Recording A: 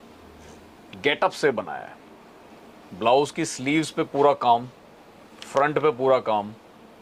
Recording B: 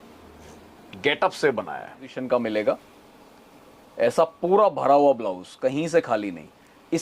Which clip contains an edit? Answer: B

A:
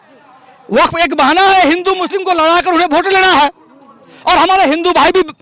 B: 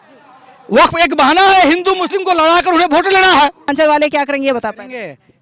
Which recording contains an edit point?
B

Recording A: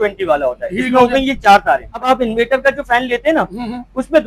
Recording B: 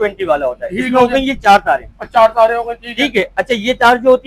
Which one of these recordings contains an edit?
A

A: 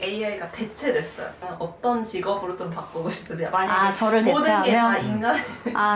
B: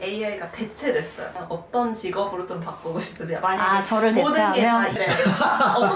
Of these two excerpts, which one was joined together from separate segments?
B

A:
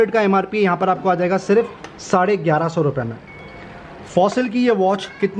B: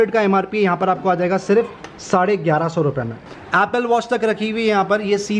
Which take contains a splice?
B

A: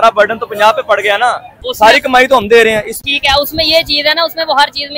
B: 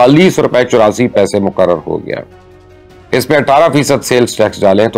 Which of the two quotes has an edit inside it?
A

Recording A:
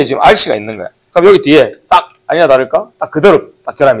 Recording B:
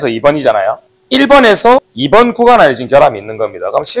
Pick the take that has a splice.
B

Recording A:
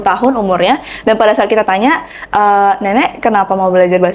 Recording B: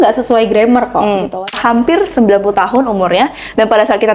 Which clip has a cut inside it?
B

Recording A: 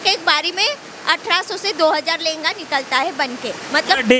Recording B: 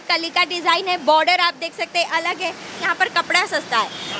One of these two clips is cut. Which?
B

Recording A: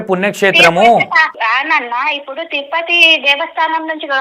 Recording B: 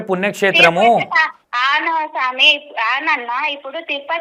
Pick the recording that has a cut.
A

